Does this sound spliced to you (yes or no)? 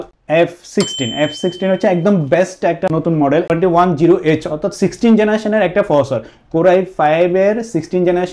yes